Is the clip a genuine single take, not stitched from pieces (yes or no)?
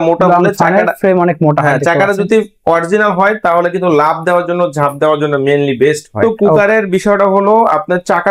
no